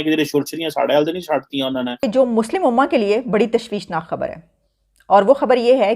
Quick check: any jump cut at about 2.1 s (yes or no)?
yes